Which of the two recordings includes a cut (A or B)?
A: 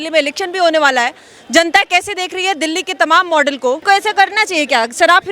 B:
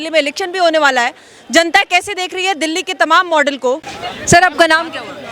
B